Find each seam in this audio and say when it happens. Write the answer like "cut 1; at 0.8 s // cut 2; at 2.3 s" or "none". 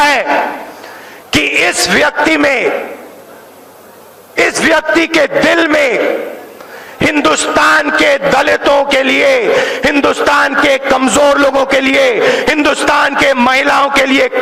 none